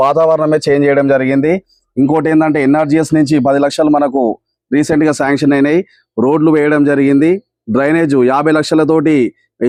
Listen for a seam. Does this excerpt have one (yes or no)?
no